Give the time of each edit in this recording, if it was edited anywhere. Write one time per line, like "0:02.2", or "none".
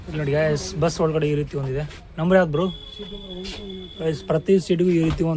none